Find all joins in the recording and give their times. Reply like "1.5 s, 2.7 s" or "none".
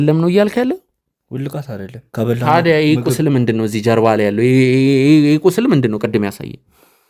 2.0 s